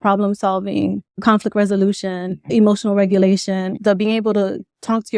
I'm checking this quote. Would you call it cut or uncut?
cut